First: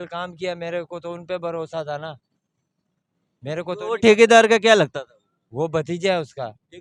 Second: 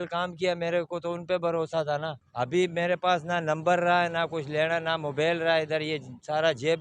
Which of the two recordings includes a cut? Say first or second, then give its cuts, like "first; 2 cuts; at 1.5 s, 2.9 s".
second; 1 cut; at 2.2 s